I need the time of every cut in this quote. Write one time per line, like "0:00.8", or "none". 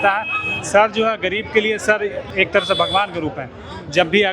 0:02.2